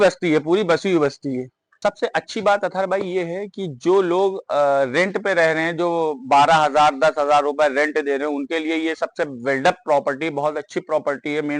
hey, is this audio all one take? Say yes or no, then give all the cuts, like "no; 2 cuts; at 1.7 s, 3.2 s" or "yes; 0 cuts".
no; 1 cut; at 1.8 s